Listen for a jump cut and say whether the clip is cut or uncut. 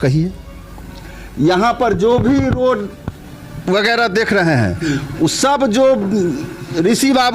uncut